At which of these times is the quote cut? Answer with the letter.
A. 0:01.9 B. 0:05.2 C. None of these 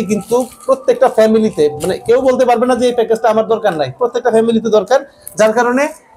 C